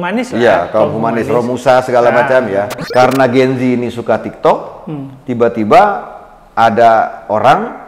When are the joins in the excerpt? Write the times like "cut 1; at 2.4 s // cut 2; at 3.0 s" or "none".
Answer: cut 1; at 2.8 s